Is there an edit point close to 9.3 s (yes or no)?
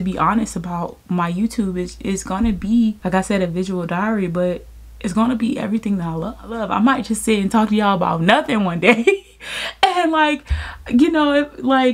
no